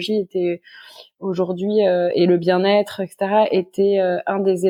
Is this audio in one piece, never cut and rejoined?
yes; 0 cuts

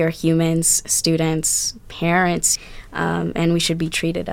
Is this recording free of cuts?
no; 1 cut; at 2.5 s

